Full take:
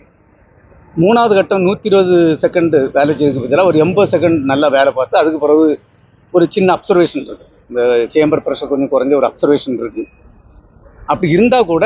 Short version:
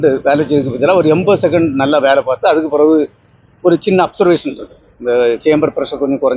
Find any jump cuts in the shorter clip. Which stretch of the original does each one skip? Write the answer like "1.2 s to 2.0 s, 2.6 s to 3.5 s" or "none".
none